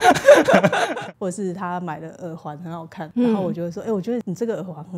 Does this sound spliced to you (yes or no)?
yes